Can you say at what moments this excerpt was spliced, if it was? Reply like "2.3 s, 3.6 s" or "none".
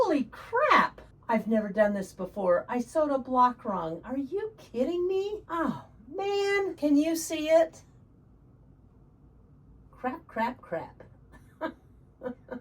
1.1 s, 5.4 s, 6.8 s, 9.9 s